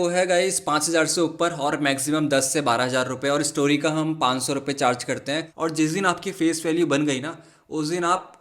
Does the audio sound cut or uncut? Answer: cut